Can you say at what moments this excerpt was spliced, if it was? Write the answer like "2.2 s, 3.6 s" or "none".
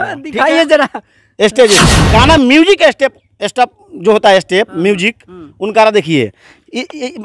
2.0 s